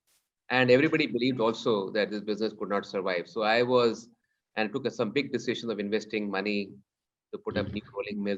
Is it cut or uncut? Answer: uncut